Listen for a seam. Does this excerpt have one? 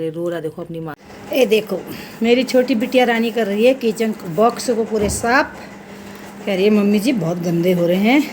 yes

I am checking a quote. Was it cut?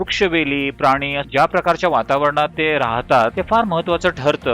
yes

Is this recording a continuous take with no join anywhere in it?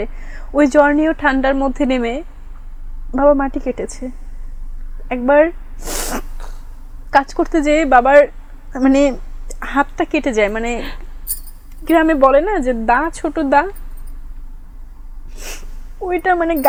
yes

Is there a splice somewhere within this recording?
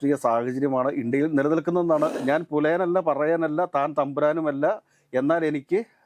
yes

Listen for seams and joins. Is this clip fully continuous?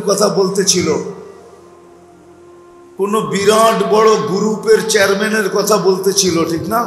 no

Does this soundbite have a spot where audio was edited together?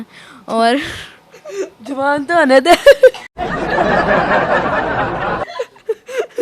yes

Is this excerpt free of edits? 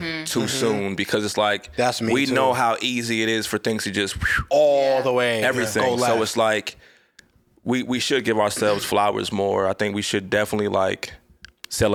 yes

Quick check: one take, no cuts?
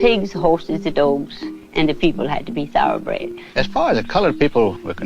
no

